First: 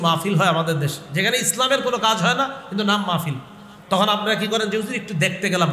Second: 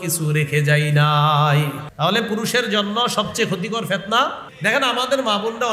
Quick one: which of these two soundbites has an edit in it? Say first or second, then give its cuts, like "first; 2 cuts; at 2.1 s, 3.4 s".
second; 2 cuts; at 1.8 s, 4.5 s